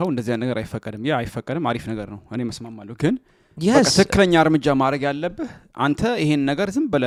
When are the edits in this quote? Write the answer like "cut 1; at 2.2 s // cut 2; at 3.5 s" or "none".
none